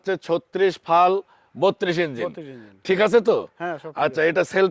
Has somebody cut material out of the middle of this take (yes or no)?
no